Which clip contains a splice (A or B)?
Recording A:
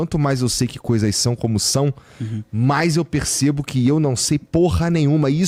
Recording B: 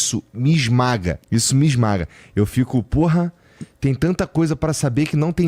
B